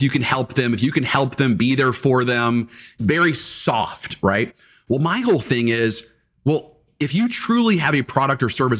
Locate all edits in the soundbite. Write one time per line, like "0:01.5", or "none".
0:02.9
0:06.9